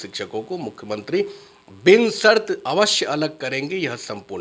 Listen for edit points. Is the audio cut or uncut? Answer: uncut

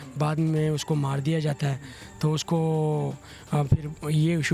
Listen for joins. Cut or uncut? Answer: uncut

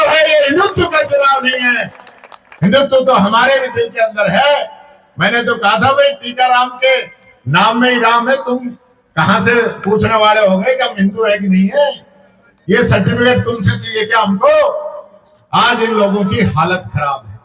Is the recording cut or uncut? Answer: uncut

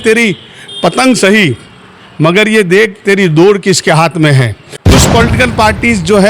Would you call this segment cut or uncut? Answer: cut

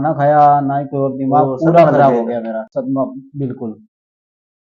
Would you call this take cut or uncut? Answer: uncut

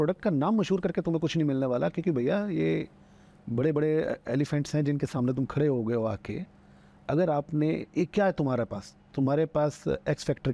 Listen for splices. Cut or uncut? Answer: uncut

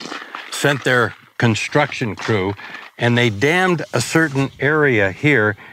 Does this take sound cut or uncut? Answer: uncut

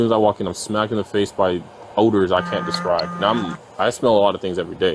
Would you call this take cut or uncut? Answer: uncut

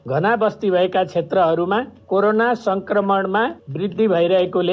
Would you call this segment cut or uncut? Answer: cut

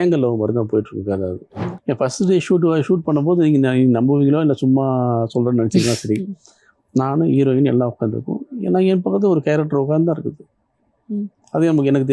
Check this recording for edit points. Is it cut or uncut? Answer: cut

